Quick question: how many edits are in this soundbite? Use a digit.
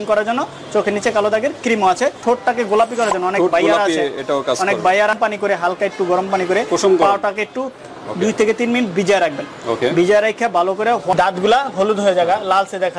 3